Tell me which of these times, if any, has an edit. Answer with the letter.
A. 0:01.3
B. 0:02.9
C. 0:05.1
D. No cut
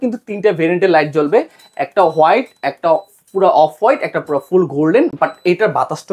D